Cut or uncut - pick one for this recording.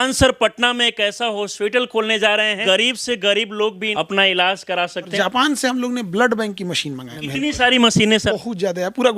cut